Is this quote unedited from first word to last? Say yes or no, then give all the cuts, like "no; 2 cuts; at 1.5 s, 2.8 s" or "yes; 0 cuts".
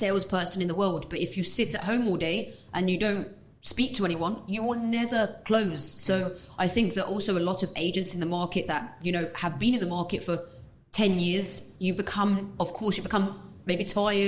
yes; 0 cuts